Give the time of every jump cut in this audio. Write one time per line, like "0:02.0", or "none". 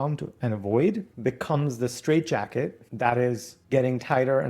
0:01.1
0:02.8
0:03.5